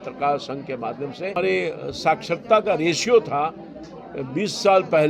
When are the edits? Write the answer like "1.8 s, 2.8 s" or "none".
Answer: 1.4 s

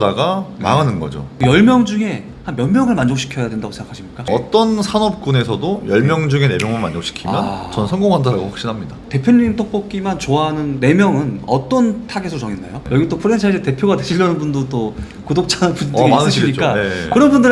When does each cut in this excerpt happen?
1.2 s, 12.9 s

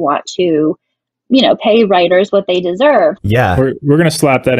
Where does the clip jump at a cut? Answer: 3.2 s

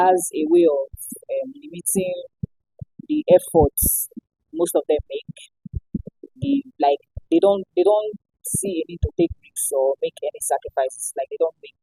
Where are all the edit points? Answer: none

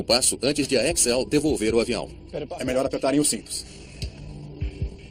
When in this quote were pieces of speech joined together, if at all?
none

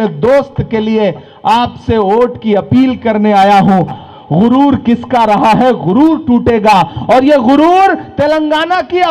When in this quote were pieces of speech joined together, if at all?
4.0 s

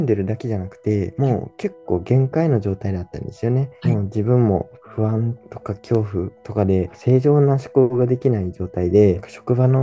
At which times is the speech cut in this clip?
none

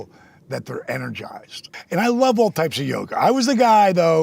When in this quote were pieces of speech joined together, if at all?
1.6 s

